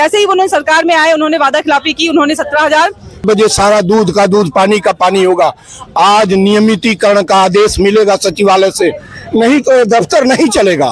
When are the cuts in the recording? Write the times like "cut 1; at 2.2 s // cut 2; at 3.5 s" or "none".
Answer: cut 1; at 3.2 s